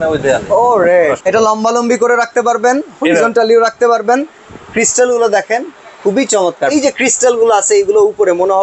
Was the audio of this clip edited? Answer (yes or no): yes